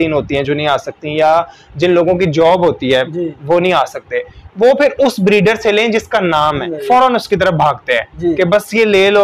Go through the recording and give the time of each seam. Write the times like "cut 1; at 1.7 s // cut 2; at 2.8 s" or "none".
cut 1; at 6.7 s